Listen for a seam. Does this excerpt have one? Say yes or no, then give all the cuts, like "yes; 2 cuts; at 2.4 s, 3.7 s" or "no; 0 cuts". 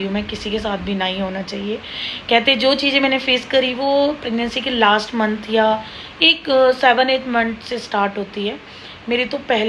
no; 0 cuts